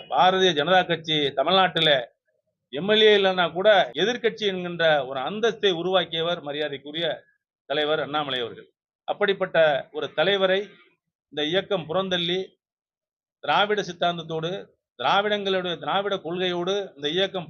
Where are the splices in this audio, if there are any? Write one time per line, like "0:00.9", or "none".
0:03.9